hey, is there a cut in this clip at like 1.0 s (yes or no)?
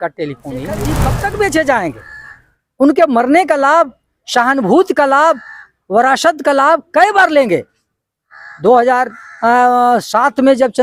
yes